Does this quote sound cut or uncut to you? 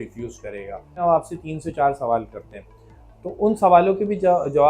cut